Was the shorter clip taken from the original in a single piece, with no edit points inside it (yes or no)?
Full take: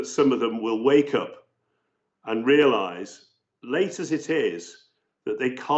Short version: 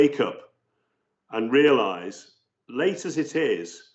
yes